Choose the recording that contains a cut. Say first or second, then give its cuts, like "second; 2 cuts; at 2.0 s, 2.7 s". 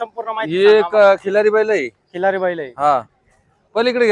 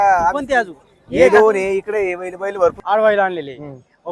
second; 1 cut; at 2.8 s